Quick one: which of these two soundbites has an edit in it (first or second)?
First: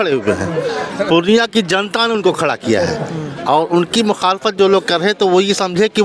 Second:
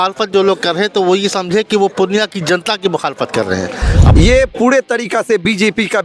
second